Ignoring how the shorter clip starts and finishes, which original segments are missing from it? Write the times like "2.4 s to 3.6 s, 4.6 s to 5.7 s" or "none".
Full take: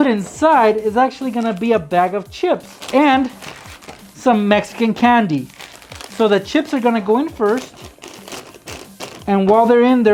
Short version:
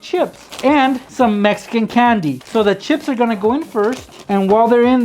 3.4 s to 4.1 s, 5.5 s to 6.1 s, 7.8 s to 9.1 s